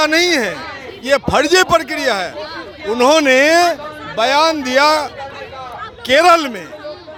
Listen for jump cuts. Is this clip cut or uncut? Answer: uncut